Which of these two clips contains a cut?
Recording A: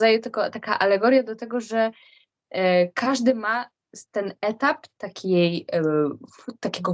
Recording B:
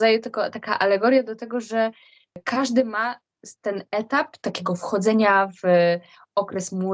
B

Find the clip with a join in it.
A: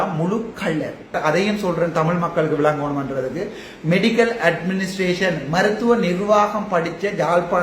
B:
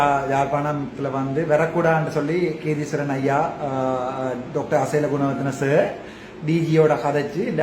A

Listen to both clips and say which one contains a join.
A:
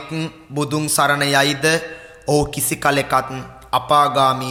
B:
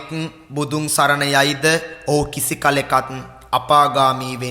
B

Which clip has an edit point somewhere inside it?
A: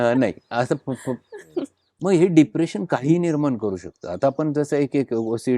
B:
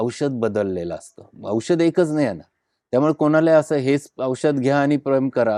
A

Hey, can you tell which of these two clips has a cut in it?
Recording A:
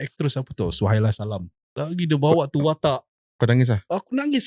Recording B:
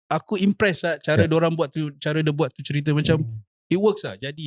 A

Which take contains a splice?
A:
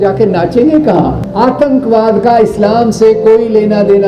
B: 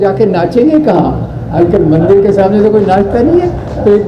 A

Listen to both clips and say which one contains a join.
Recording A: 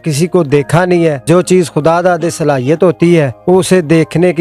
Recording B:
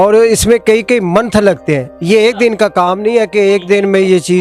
A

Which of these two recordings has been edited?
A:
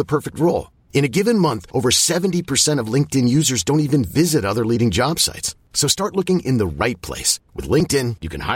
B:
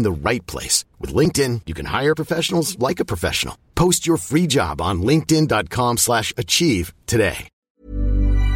B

